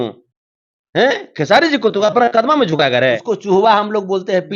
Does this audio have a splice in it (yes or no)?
yes